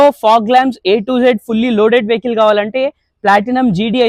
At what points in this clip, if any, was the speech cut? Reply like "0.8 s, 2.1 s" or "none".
none